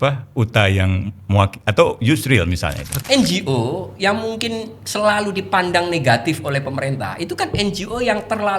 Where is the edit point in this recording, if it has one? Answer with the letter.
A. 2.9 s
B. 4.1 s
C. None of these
A